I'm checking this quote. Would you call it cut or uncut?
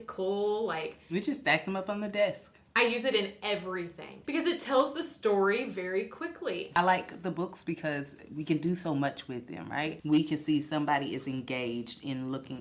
cut